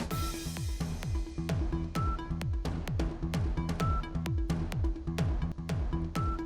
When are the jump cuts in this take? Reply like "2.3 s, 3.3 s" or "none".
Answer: 5.5 s